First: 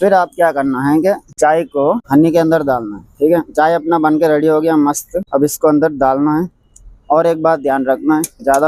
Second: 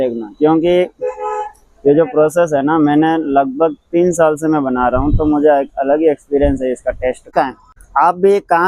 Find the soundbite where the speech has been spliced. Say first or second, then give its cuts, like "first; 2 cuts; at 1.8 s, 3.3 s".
second; 1 cut; at 7.3 s